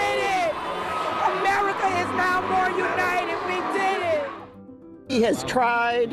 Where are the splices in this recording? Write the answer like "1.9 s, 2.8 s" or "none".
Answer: 4.7 s